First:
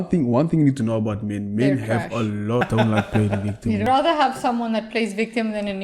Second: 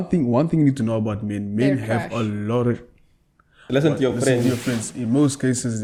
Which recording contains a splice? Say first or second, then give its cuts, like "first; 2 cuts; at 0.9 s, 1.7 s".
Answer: first; 2 cuts; at 2.6 s, 3.8 s